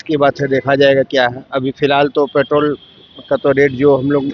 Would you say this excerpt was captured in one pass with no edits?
yes; 0 cuts

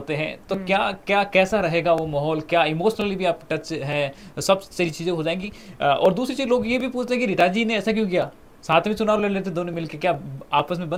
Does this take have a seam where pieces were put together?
no; 0 cuts

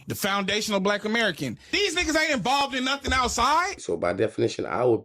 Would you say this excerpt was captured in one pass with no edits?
no; 1 cut; at 3.8 s

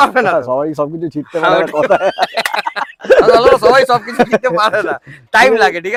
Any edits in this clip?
no; 0 cuts

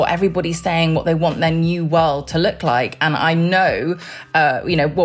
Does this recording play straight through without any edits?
yes; 0 cuts

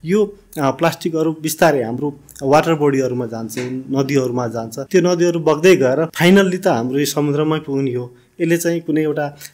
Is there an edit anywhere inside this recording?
yes; 2 cuts; at 4.8 s, 6.1 s

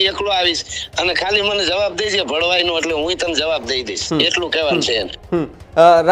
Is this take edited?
no; 0 cuts

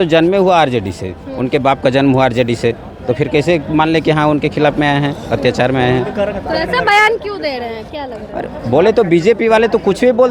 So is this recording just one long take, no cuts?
yes; 0 cuts

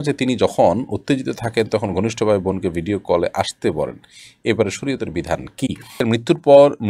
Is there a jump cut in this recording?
yes; 1 cut; at 5.9 s

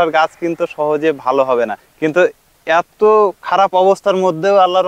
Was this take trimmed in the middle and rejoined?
yes; 1 cut; at 1.8 s

